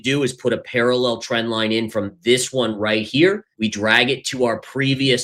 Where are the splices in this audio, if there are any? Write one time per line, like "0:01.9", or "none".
0:03.5